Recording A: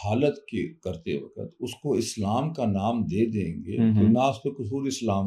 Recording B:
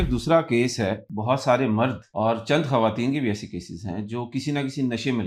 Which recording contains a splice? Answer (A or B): B